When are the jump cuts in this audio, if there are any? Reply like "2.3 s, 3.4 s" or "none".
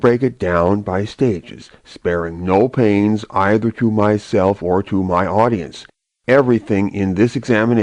none